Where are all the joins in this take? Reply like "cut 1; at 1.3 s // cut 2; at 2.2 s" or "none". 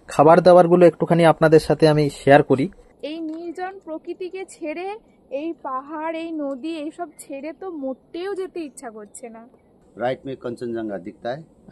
cut 1; at 2.9 s // cut 2; at 9.7 s